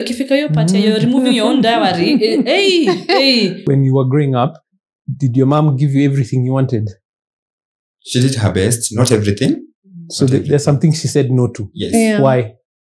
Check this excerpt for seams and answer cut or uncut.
cut